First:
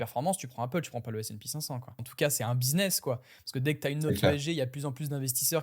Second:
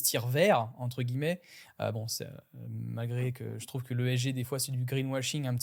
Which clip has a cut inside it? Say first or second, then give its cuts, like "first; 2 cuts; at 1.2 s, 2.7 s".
first; 1 cut; at 2.0 s